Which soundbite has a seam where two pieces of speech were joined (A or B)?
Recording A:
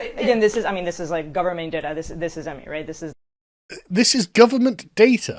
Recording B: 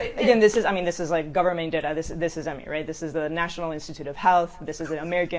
B